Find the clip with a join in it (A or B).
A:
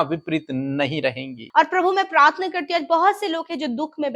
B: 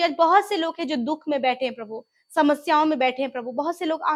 A